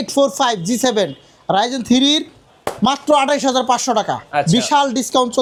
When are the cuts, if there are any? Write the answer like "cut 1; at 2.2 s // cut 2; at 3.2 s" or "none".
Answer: none